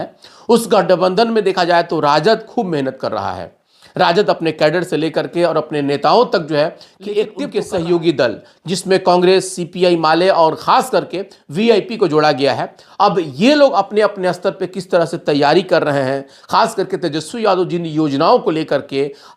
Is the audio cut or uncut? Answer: cut